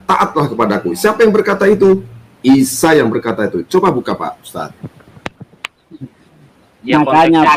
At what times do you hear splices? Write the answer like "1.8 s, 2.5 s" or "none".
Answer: none

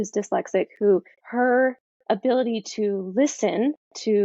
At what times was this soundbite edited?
1.2 s

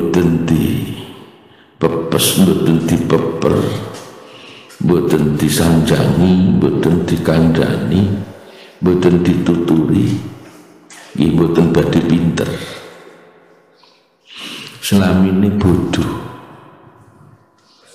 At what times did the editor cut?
none

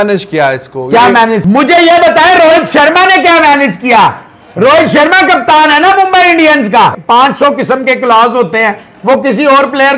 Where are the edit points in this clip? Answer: 1.4 s, 7.0 s

